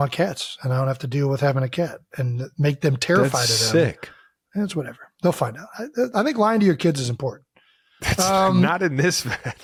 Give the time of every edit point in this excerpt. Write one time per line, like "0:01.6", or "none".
none